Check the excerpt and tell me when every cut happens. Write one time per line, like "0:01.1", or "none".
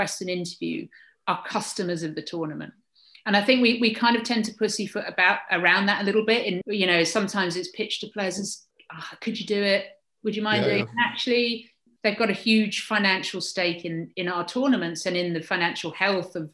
0:06.6
0:14.1